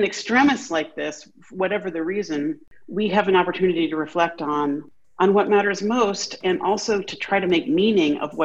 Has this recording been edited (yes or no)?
yes